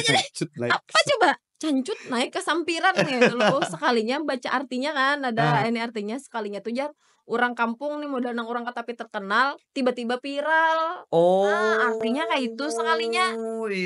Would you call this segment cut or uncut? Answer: uncut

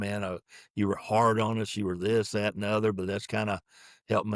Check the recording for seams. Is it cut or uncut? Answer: uncut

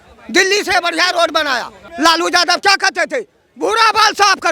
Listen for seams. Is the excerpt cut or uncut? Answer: cut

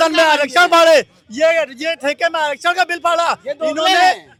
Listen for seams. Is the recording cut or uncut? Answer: uncut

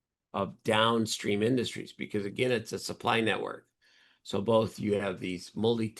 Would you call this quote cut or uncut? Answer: uncut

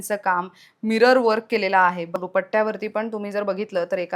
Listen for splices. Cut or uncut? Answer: cut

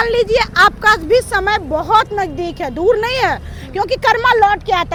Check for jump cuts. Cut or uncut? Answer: uncut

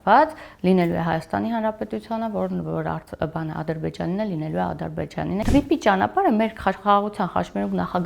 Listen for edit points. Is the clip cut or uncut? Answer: cut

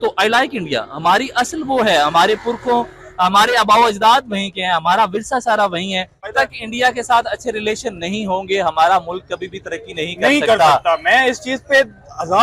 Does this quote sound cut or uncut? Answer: cut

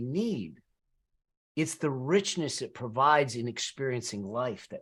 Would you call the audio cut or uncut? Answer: uncut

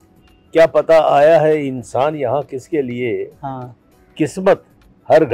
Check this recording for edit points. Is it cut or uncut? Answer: uncut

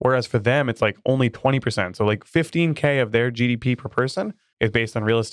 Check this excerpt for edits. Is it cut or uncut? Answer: cut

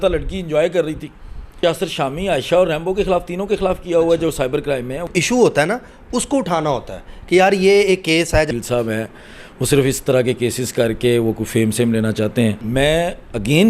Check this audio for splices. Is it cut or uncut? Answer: cut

